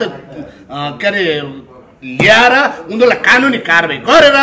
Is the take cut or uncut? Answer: uncut